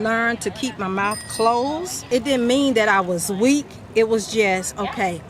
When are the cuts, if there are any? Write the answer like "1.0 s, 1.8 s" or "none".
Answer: 2.0 s